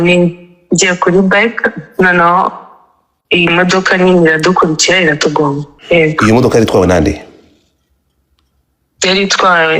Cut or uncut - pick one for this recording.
cut